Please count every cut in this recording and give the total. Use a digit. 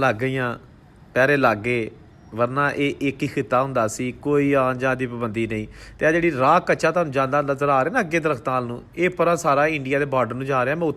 0